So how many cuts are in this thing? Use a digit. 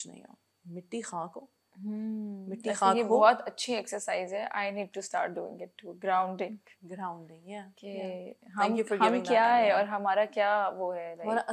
0